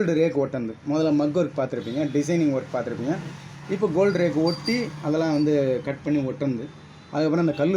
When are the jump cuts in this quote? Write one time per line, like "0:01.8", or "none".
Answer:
none